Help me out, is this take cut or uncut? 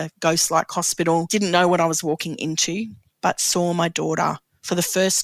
cut